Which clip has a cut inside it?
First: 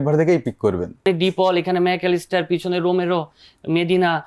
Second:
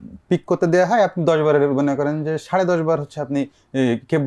first; 1 cut; at 1.1 s

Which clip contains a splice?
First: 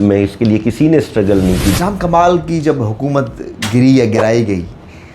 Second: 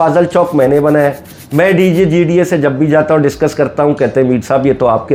first; 1 cut; at 1.8 s

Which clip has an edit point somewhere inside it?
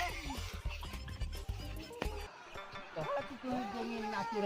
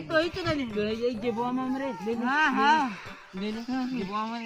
first; 1 cut; at 2.2 s

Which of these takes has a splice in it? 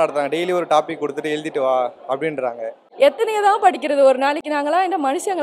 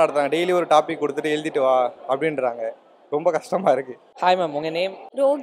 first; 1 cut; at 2.8 s

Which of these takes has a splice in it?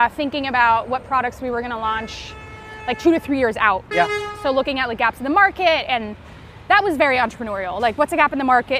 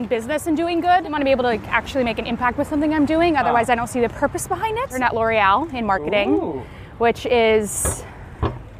second; 2 cuts; at 1.1 s, 4.9 s

